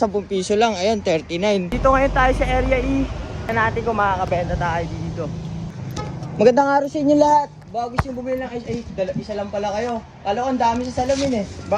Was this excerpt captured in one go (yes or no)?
no